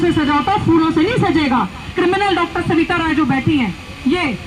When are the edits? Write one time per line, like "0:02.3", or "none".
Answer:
0:01.8